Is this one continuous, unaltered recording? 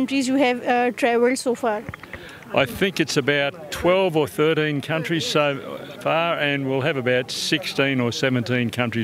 yes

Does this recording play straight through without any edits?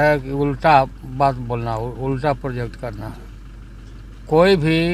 yes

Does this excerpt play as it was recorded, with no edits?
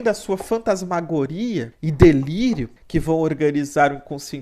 no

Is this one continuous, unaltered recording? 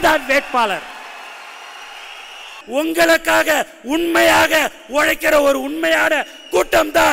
no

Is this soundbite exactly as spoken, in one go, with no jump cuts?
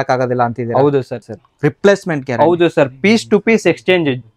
no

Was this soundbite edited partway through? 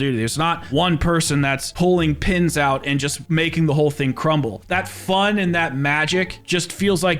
yes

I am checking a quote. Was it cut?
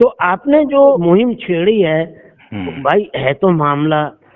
yes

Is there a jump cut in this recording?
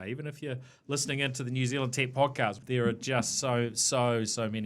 yes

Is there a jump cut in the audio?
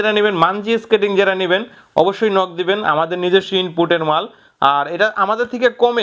no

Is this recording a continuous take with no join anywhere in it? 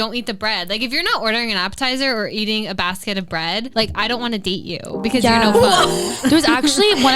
no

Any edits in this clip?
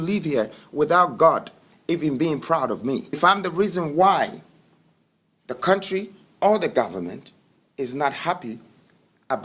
yes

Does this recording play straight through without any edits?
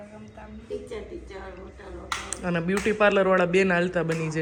yes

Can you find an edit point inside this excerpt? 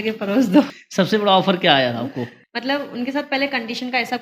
yes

